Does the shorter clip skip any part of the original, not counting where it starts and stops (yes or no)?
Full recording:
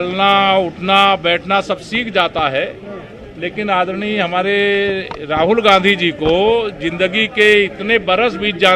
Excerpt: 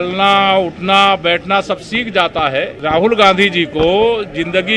yes